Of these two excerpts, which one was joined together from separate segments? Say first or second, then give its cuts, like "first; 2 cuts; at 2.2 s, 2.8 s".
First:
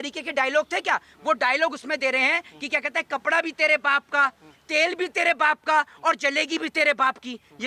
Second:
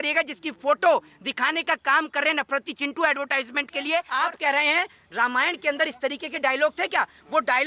second; 1 cut; at 4.1 s